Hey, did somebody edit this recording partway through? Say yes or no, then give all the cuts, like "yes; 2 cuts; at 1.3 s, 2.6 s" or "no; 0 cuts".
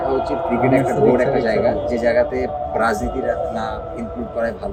no; 0 cuts